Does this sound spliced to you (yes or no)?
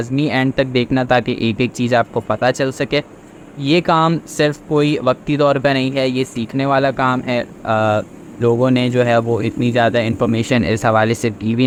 no